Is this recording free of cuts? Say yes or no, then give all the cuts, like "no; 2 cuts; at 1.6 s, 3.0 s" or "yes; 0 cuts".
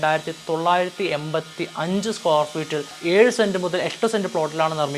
no; 1 cut; at 3.0 s